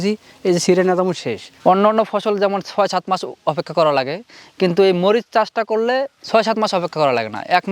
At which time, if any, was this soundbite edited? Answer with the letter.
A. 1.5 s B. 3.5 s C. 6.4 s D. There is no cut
A